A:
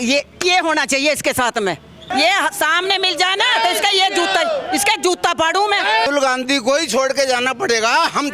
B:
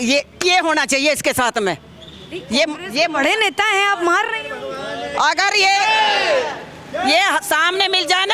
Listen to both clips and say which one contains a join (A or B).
A